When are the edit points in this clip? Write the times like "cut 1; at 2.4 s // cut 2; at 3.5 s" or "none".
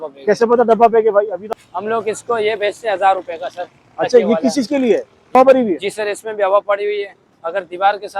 cut 1; at 1.5 s // cut 2; at 5.4 s